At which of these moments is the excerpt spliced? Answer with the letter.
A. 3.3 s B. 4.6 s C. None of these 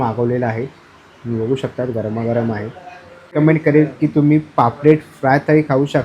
A